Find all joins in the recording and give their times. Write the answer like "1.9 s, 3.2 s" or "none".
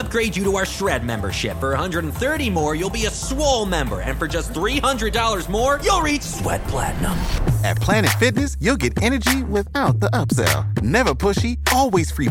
none